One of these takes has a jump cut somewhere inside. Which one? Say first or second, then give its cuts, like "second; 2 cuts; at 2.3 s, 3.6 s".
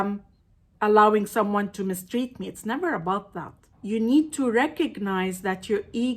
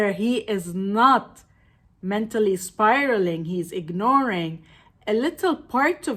first; 1 cut; at 3.6 s